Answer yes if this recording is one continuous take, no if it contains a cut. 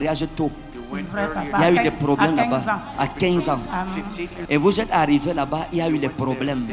no